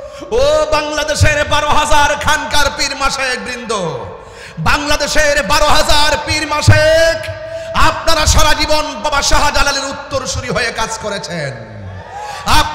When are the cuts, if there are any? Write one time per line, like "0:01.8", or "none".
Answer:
none